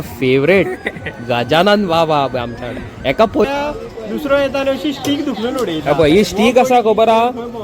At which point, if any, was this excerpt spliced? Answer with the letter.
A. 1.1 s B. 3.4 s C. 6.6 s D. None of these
B